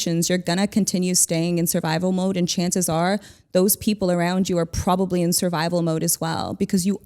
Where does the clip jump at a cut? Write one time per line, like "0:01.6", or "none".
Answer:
none